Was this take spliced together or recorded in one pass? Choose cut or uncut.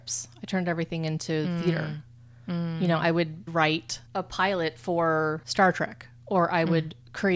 cut